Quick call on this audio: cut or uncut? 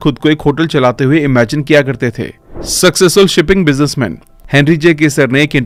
uncut